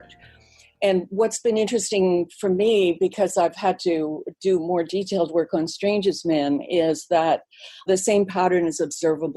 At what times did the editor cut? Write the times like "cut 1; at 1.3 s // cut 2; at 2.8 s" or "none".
cut 1; at 7.9 s